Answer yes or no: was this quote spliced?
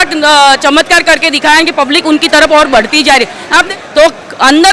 yes